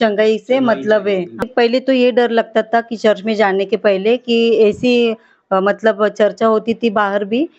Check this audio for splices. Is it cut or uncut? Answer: cut